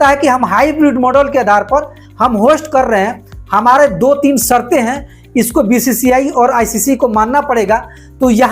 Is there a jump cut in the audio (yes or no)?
yes